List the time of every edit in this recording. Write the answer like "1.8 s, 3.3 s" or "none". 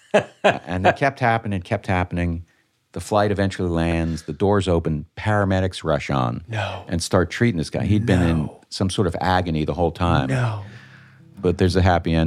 11.3 s